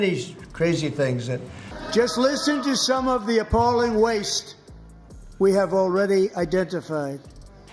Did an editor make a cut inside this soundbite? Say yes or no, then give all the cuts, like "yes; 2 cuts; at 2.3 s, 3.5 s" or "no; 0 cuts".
yes; 1 cut; at 1.5 s